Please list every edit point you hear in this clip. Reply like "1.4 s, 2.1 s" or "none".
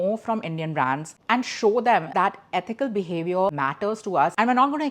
2.1 s

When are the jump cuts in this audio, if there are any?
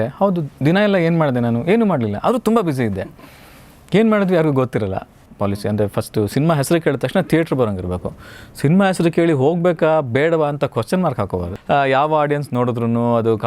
5.2 s, 11.3 s

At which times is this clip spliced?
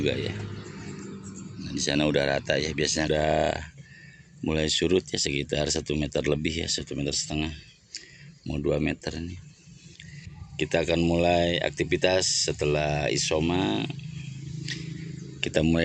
3.1 s

